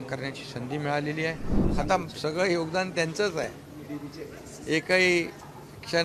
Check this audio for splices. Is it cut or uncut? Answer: cut